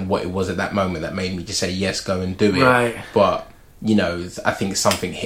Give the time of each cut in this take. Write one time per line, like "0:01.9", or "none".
none